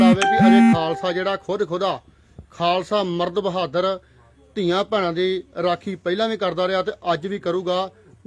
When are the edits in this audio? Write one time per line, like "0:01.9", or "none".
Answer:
none